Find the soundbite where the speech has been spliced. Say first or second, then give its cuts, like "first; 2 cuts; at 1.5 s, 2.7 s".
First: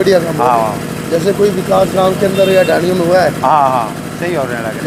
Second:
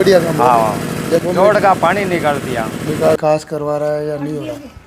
second; 2 cuts; at 1.2 s, 3.2 s